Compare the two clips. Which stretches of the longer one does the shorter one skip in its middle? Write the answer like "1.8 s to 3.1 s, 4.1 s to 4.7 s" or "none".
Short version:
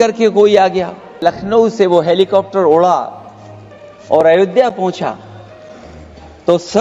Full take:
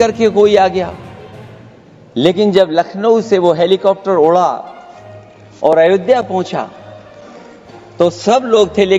1.2 s to 2.7 s